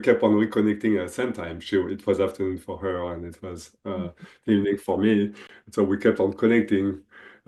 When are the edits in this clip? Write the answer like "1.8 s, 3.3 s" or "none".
none